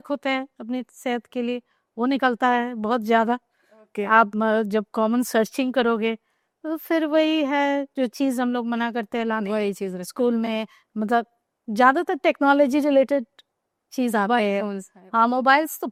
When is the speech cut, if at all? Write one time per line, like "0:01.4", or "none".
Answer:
none